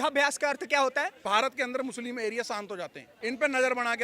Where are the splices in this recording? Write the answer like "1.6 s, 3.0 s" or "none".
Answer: 1.2 s, 3.1 s